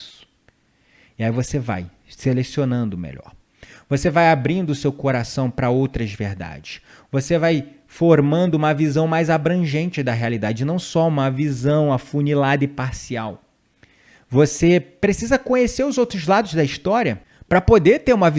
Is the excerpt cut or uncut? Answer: cut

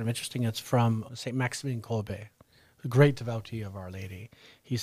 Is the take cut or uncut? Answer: cut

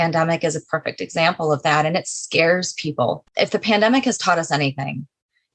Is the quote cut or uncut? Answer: cut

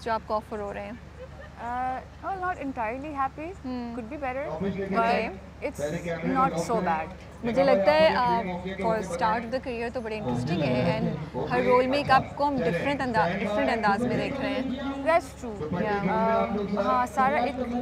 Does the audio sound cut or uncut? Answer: uncut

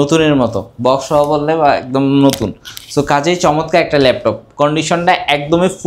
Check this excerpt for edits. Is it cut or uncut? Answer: uncut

